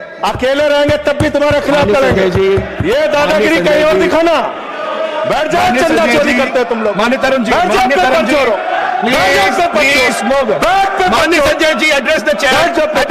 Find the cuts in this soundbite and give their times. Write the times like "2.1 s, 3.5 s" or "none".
none